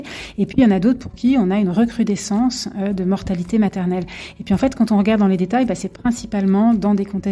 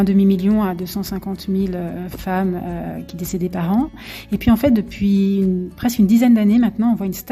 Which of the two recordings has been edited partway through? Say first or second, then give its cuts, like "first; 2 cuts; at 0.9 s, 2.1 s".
second; 1 cut; at 3.9 s